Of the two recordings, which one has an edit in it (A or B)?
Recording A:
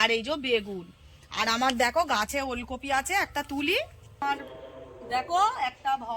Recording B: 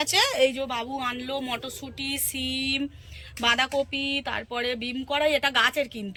A